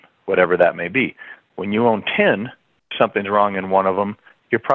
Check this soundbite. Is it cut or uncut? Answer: uncut